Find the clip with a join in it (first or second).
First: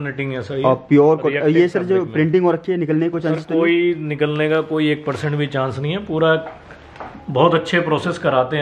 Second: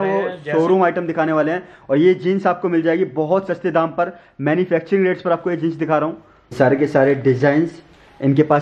second